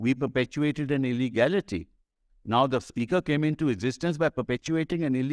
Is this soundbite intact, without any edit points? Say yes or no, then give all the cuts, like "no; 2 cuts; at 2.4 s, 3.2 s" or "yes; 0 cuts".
yes; 0 cuts